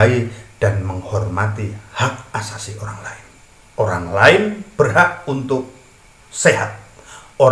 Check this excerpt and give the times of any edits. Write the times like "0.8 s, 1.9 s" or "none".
none